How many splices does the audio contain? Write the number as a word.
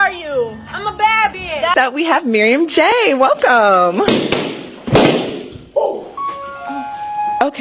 one